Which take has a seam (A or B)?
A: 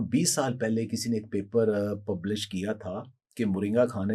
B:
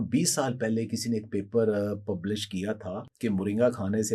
B